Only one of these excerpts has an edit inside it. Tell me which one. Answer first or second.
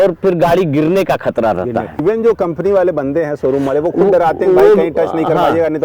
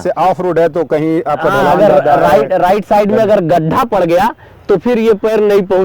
first